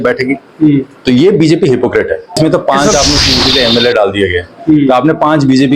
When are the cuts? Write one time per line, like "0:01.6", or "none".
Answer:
0:02.3

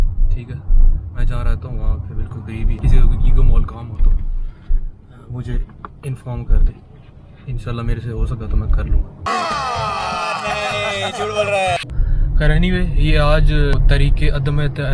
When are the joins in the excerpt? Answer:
0:02.8
0:11.9
0:13.7

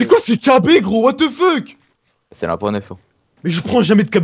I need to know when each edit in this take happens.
none

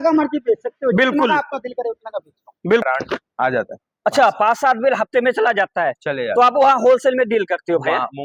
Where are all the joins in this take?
0:02.8

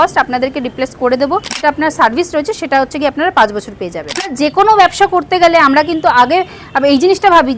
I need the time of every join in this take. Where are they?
0:01.6
0:04.3

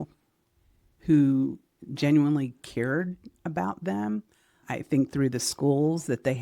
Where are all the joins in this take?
0:04.6

